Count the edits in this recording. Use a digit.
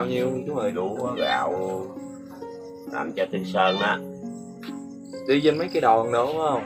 0